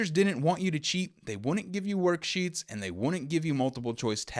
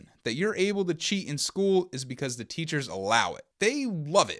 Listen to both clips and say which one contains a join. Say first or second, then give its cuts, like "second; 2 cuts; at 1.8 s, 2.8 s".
second; 1 cut; at 3.4 s